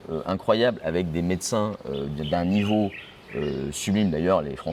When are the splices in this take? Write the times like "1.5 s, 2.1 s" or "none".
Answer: none